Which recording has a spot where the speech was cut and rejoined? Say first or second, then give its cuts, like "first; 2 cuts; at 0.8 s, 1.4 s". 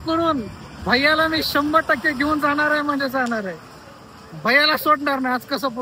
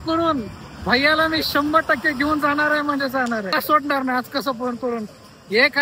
second; 1 cut; at 3.5 s